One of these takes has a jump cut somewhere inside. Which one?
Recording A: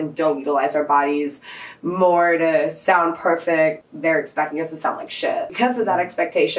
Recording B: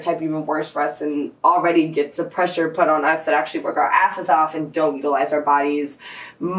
A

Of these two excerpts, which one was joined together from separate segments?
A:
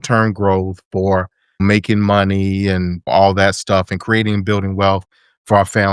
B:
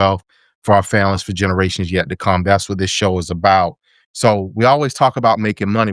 B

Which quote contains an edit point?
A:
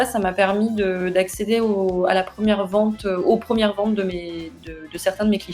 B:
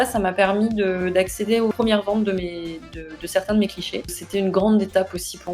B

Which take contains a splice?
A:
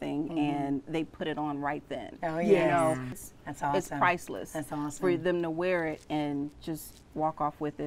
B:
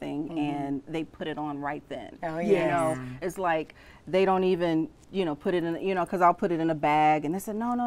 A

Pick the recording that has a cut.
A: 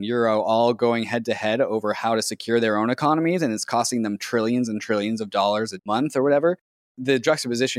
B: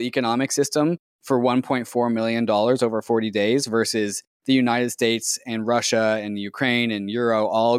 A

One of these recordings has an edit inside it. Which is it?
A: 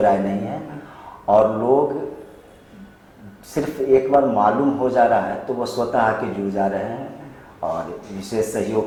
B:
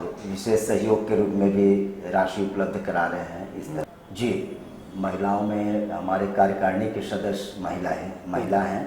B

